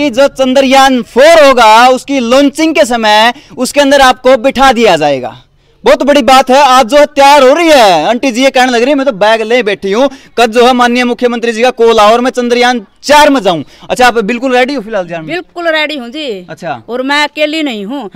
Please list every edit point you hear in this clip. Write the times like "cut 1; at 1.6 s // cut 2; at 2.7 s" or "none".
none